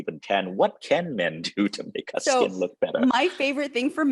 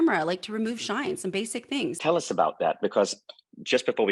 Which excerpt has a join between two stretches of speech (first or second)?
second